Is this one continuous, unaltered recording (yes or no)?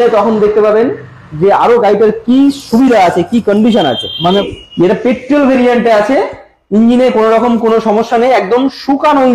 no